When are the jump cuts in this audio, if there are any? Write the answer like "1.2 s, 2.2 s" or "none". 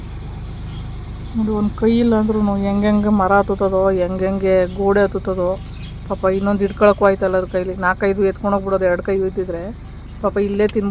none